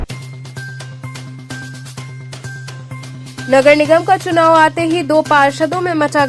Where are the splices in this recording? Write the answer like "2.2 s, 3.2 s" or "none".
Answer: 2.8 s